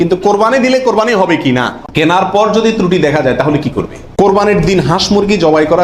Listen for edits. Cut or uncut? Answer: cut